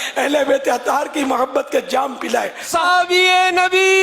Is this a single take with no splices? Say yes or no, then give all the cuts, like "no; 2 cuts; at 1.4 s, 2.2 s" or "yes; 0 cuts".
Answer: no; 1 cut; at 2.6 s